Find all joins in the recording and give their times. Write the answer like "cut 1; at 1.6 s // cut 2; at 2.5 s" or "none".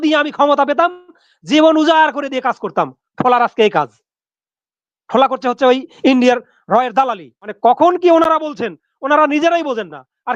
cut 1; at 7.5 s